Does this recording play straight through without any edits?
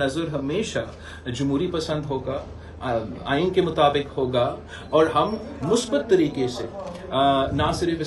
yes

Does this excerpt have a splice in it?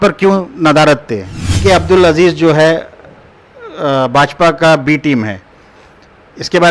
yes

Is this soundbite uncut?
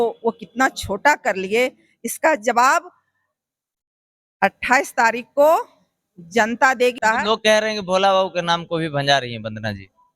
no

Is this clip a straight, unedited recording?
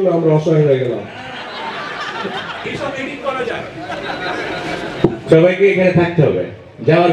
yes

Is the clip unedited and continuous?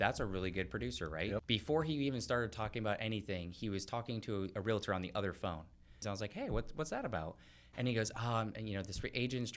no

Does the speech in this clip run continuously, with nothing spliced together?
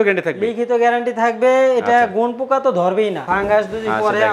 no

